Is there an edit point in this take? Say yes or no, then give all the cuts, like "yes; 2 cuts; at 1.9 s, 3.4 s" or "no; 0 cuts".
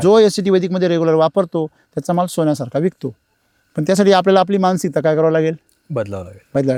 no; 0 cuts